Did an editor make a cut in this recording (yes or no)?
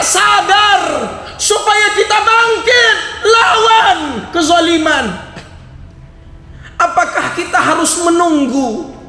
no